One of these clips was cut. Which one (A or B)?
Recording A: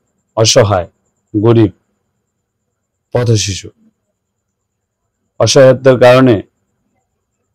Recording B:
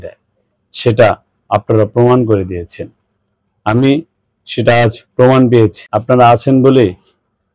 B